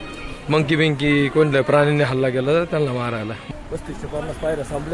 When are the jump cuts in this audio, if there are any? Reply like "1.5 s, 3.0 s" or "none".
3.4 s